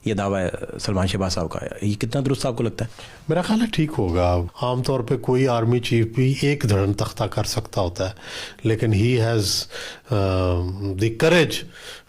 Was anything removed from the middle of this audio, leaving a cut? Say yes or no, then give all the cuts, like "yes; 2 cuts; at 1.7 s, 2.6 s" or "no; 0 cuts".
yes; 1 cut; at 4.5 s